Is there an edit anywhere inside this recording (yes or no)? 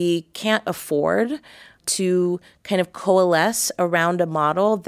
yes